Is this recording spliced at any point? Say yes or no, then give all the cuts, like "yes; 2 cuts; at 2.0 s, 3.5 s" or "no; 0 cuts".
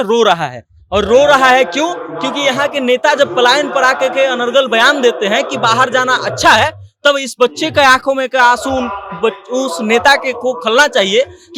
no; 0 cuts